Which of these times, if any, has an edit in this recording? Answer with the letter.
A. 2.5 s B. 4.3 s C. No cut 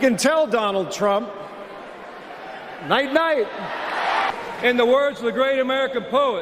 B